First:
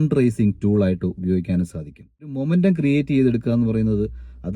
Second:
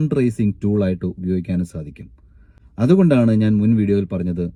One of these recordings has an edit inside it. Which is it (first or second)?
first